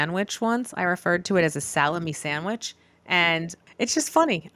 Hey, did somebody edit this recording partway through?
yes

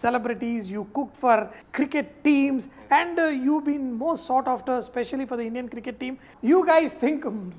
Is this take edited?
yes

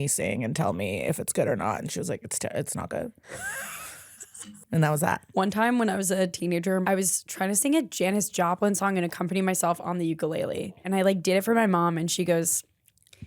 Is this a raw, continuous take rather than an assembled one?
no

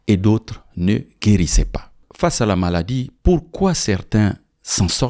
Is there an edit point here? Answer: yes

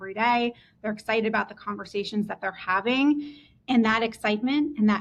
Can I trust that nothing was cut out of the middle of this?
yes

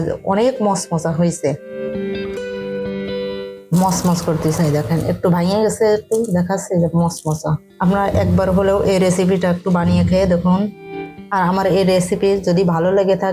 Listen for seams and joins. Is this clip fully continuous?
yes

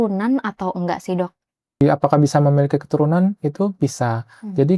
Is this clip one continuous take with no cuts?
no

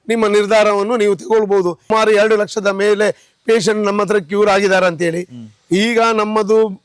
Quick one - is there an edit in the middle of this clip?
yes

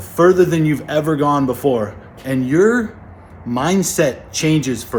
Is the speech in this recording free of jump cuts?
yes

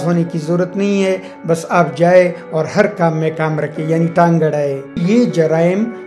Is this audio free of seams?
no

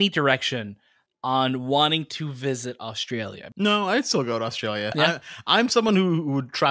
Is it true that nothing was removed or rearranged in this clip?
no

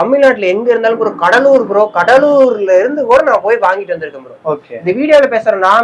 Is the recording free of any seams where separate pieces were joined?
yes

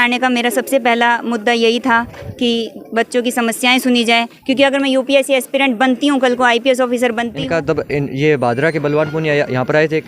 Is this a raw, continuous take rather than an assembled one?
no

